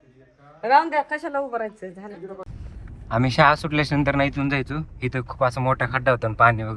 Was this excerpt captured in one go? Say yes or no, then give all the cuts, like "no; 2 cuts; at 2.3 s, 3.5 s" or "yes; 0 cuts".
yes; 0 cuts